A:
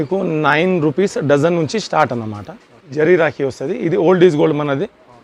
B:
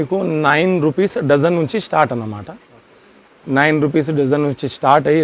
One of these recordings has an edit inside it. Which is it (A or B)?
A